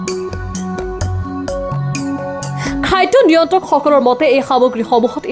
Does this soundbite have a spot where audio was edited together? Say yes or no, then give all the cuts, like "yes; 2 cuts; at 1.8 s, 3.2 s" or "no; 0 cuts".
no; 0 cuts